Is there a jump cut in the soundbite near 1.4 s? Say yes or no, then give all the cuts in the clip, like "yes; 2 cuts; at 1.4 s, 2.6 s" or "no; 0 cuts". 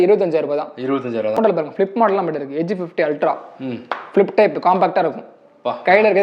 yes; 1 cut; at 1.4 s